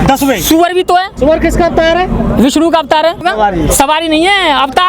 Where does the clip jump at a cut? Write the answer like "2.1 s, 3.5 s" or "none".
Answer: 1.1 s, 3.2 s